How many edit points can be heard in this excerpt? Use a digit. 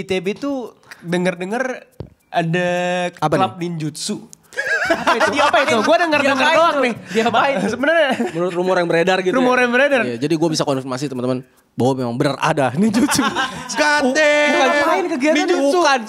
0